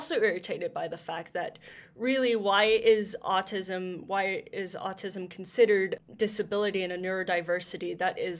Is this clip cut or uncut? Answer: cut